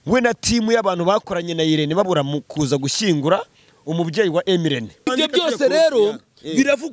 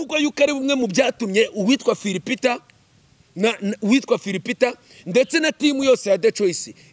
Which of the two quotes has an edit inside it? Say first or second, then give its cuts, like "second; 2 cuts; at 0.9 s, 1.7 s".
first; 1 cut; at 5.1 s